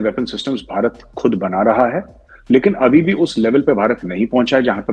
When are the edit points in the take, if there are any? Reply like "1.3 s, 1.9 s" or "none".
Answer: none